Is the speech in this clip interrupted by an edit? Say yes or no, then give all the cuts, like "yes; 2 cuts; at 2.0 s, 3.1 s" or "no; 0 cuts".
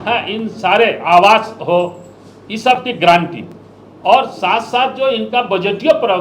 no; 0 cuts